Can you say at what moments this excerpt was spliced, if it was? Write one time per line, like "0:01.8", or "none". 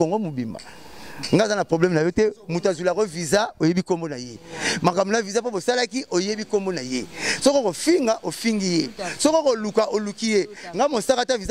none